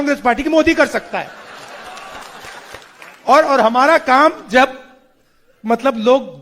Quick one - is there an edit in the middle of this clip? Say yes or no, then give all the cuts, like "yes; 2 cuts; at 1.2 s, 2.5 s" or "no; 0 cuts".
yes; 1 cut; at 2.8 s